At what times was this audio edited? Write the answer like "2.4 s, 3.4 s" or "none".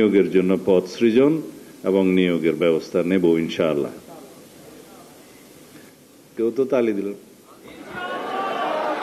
none